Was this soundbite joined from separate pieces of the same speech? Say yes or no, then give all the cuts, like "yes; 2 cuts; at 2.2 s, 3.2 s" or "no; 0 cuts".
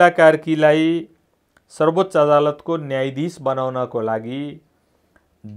no; 0 cuts